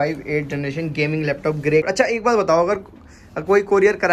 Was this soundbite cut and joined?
yes; 1 cut; at 1.9 s

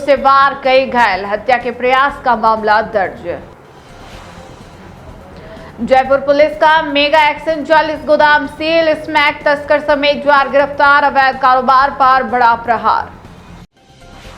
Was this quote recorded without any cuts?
yes; 0 cuts

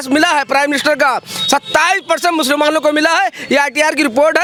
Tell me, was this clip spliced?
no; 0 cuts

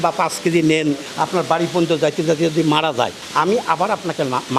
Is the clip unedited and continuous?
yes; 0 cuts

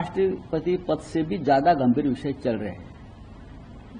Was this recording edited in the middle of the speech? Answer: no; 0 cuts

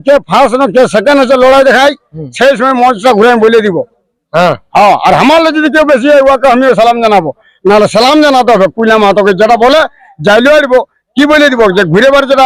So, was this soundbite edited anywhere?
no; 0 cuts

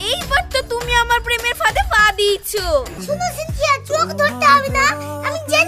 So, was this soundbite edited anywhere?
yes; 1 cut; at 2.9 s

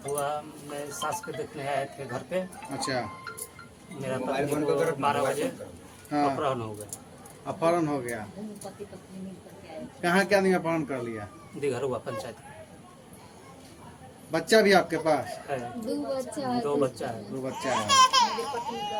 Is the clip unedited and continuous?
yes; 0 cuts

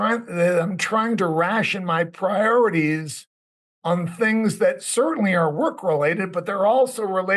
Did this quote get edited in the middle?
no; 0 cuts

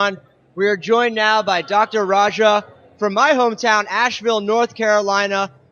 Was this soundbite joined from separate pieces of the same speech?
yes; 1 cut; at 2.4 s

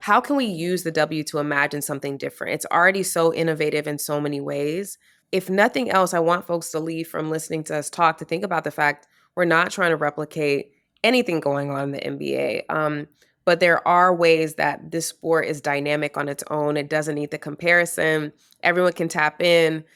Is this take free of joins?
yes; 0 cuts

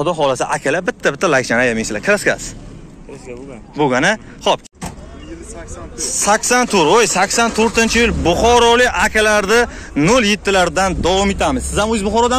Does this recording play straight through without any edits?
no; 1 cut; at 4.6 s

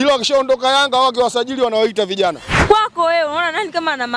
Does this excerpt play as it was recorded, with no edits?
no; 1 cut; at 2.5 s

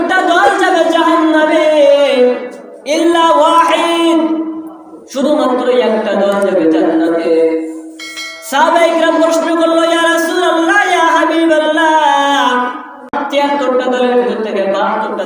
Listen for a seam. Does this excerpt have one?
yes; 1 cut; at 13.2 s

